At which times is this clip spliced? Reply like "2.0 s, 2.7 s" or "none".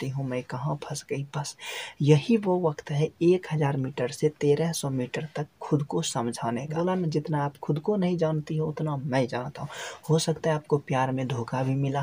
6.7 s